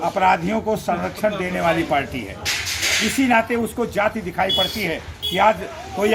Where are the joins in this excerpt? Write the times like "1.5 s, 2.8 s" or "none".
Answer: none